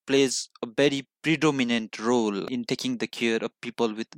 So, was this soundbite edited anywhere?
no; 0 cuts

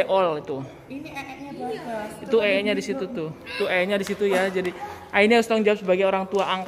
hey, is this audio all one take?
yes; 0 cuts

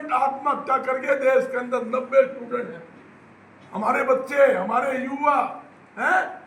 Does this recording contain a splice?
no; 0 cuts

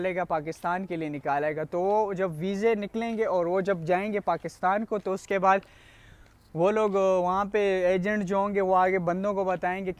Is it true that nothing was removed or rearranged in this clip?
yes; 0 cuts

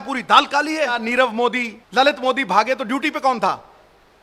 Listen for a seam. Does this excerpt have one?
yes; 2 cuts; at 1.0 s, 1.8 s

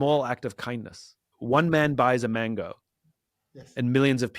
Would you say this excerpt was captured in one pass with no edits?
no; 1 cut; at 1.3 s

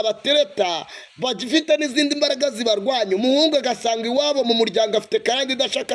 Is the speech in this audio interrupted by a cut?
no; 0 cuts

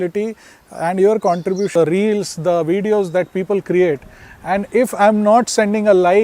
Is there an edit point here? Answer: yes; 1 cut; at 1.7 s

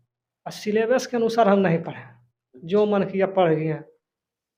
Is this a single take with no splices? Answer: yes; 0 cuts

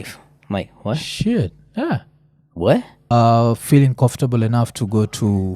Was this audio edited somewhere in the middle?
yes; 1 cut; at 3.0 s

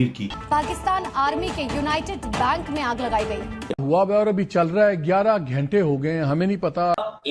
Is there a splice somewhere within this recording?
no; 0 cuts

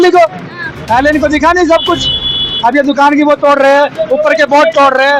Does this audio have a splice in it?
no; 0 cuts

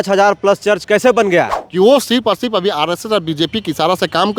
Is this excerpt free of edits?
no; 1 cut; at 1.6 s

